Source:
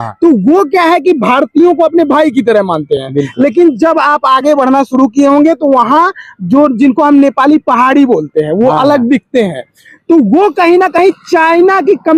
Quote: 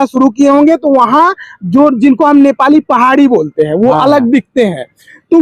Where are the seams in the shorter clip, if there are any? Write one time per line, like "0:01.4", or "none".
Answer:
none